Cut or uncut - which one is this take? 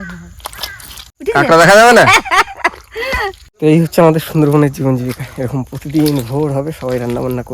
cut